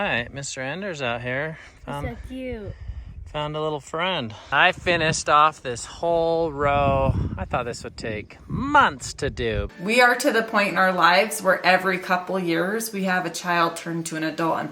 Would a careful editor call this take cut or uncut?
cut